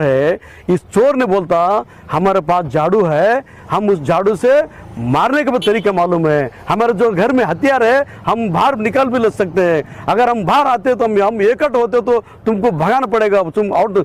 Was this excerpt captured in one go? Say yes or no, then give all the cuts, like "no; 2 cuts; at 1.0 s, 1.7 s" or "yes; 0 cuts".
yes; 0 cuts